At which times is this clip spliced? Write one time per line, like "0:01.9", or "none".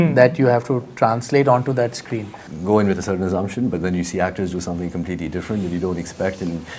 0:02.5